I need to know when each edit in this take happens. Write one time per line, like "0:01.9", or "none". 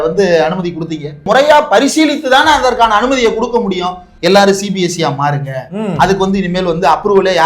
0:01.2
0:04.0